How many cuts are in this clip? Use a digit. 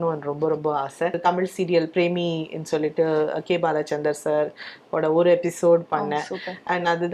1